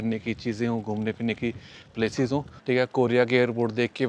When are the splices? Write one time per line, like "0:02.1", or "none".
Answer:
0:02.5

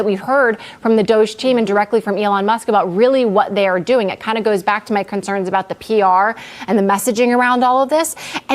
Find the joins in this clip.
0:04.6

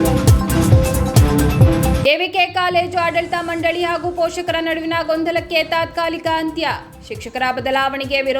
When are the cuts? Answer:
0:02.0

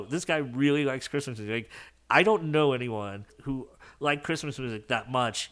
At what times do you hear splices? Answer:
0:03.3

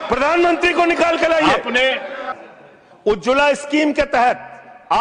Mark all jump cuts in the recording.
0:02.3

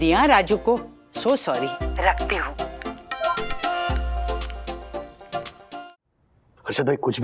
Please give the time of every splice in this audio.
0:05.9

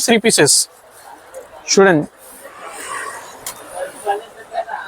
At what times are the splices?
none

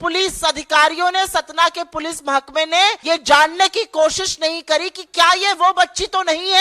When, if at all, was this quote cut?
0:03.0

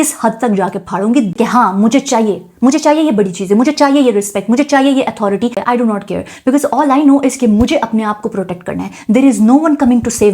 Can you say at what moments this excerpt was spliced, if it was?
0:01.3
0:05.5

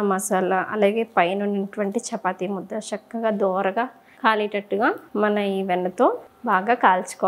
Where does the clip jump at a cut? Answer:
0:06.3

